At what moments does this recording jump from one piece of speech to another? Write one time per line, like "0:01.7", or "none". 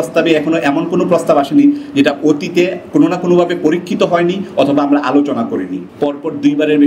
0:05.8